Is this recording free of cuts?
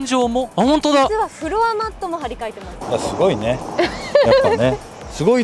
no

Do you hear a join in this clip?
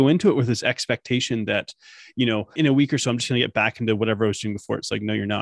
yes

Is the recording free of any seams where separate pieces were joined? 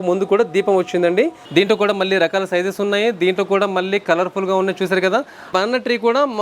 no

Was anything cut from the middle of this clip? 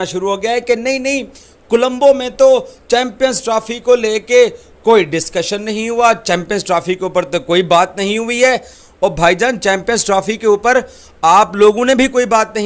no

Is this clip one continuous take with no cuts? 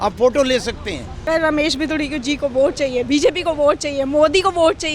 no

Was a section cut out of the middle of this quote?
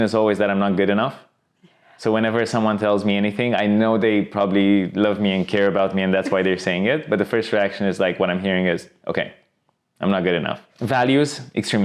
yes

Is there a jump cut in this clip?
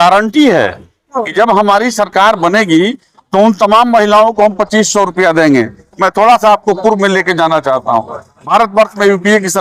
no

